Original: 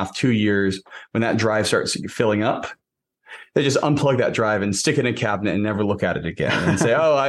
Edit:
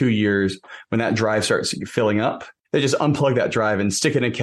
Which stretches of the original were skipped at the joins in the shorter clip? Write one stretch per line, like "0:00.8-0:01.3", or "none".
0:02.7-0:03.3